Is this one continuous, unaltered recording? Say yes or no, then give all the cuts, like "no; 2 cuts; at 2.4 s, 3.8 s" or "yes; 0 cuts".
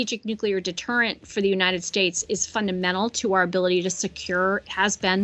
yes; 0 cuts